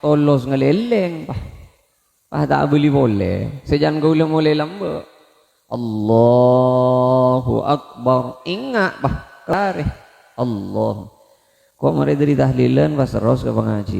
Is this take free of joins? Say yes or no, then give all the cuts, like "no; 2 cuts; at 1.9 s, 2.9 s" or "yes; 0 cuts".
no; 1 cut; at 9.5 s